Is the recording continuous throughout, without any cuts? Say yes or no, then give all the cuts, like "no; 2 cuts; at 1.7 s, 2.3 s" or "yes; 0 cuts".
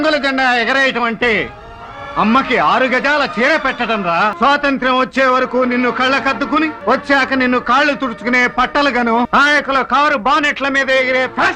no; 3 cuts; at 4.3 s, 6.8 s, 9.3 s